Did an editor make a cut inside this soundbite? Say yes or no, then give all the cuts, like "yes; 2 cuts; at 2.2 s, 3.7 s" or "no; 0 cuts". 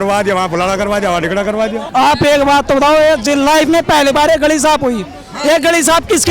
yes; 1 cut; at 1.8 s